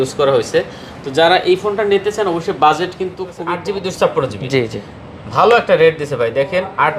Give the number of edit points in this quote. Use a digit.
1